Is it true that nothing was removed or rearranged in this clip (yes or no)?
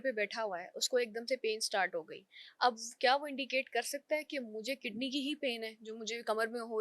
yes